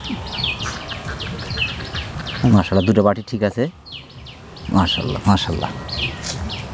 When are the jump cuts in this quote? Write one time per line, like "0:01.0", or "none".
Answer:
none

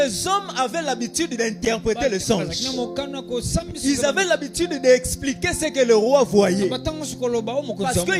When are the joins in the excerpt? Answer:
none

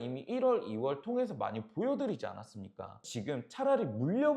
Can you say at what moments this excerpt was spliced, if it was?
0:03.0

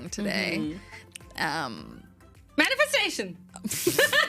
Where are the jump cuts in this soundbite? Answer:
none

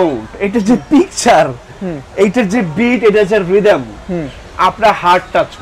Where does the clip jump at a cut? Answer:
none

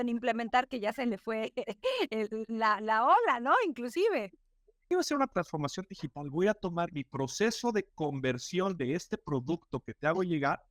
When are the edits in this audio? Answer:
0:04.9

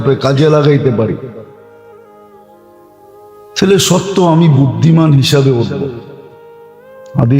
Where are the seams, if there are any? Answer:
0:01.4
0:03.0

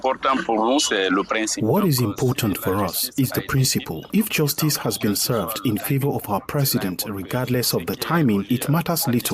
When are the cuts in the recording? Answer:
0:04.0
0:08.5

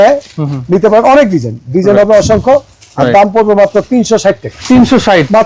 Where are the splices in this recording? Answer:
none

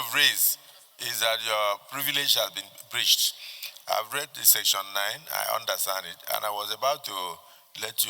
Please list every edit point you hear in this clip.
none

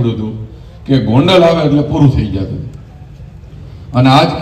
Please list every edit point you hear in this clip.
none

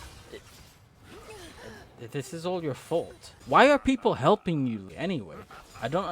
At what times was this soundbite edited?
0:03.4
0:04.9

